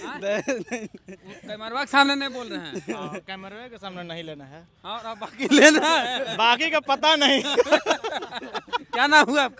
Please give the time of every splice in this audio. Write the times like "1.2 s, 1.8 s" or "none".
none